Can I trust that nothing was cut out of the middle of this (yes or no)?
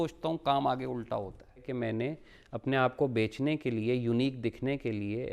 no